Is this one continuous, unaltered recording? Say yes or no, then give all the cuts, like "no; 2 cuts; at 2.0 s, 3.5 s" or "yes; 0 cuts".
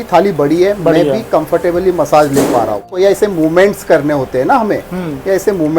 no; 1 cut; at 2.9 s